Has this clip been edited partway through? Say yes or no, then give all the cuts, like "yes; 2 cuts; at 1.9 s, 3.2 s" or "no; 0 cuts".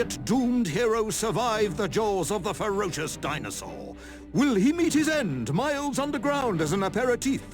yes; 1 cut; at 6.4 s